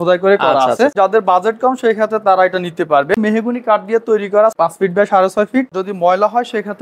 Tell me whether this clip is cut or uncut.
cut